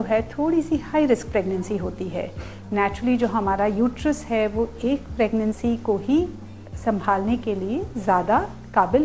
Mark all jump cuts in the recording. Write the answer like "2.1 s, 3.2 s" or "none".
none